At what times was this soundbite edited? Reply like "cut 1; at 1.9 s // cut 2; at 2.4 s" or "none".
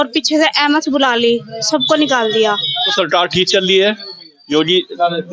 cut 1; at 2.9 s